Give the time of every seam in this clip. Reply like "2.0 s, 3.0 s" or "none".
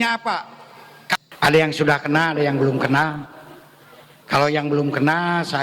1.2 s

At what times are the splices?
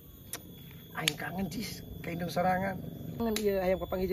3.2 s

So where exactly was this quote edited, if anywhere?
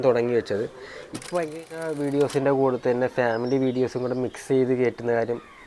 1.7 s

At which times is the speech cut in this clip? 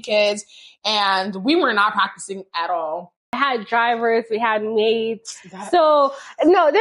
3.4 s

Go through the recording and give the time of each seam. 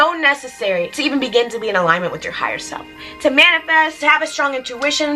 0.9 s

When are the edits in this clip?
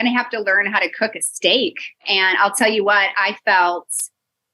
2.1 s

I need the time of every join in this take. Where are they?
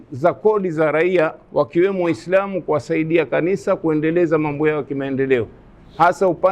none

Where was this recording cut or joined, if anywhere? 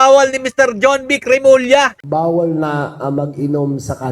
2.0 s

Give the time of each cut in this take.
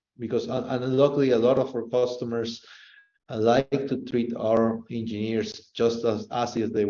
none

